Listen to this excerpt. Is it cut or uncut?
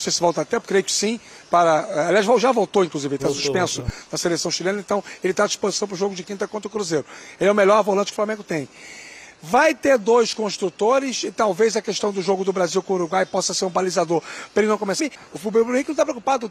cut